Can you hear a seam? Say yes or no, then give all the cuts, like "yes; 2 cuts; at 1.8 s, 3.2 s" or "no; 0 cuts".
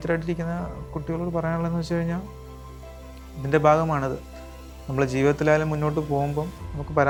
no; 0 cuts